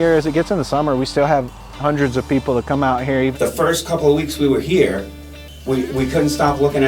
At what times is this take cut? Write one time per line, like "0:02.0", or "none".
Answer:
0:03.3